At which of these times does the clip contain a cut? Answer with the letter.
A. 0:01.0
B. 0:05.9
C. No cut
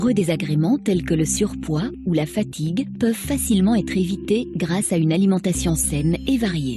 B